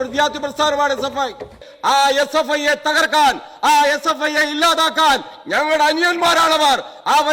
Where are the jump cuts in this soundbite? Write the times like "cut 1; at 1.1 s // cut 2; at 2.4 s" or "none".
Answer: cut 1; at 1.6 s